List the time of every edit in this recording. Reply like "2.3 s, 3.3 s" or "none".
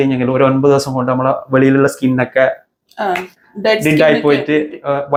none